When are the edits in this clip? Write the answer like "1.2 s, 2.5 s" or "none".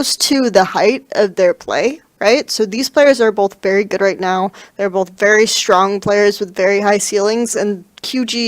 2.2 s